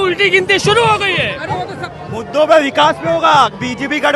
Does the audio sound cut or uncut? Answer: cut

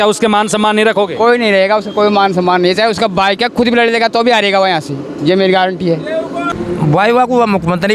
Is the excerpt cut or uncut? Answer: cut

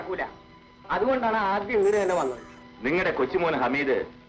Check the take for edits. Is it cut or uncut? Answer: uncut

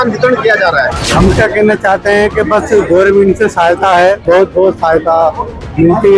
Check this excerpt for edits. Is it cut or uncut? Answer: cut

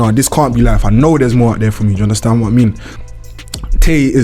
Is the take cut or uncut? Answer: cut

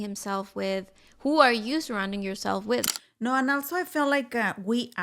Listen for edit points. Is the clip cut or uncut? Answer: cut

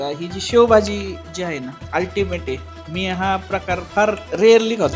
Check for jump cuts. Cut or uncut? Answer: cut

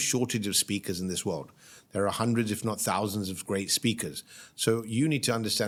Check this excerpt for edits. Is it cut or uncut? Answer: uncut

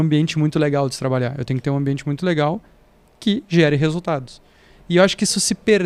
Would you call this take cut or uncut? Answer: uncut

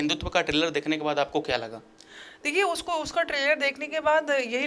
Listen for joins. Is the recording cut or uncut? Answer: uncut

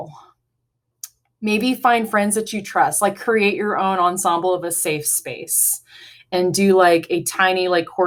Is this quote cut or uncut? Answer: uncut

